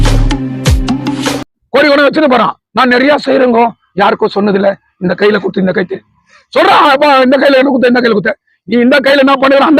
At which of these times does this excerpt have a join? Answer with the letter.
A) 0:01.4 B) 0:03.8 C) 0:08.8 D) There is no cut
A